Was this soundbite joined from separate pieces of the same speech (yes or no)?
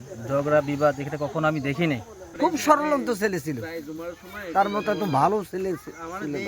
yes